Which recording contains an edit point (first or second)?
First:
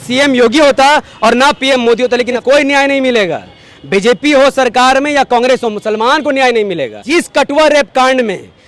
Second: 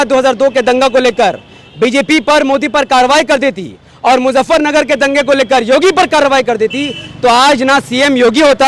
first